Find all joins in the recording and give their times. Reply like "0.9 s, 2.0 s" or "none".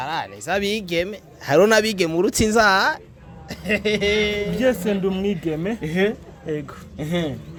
none